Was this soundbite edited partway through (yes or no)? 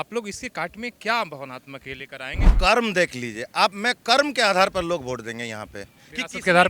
yes